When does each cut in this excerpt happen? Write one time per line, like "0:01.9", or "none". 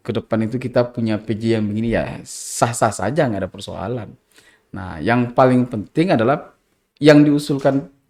none